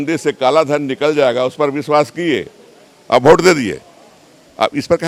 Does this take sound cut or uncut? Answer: uncut